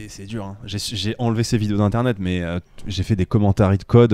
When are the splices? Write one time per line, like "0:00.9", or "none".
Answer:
none